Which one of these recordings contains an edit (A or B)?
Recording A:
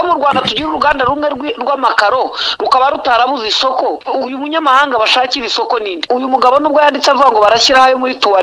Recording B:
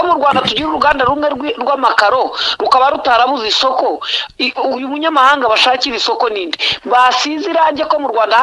A